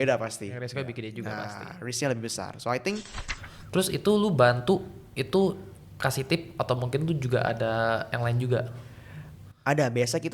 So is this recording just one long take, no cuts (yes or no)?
no